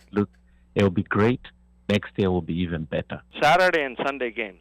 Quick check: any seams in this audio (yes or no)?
yes